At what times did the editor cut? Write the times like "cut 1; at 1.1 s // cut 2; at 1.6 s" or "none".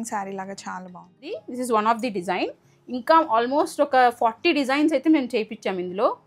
cut 1; at 1.3 s